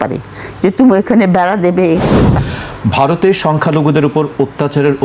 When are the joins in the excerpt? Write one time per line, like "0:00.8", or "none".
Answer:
0:02.3